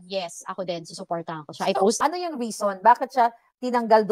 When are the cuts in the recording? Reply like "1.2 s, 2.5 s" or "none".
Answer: 2.0 s